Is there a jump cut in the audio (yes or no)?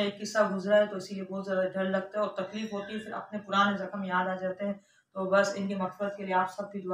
no